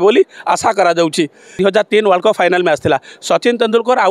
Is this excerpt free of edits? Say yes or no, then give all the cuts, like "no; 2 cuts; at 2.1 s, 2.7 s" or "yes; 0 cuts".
no; 1 cut; at 1.5 s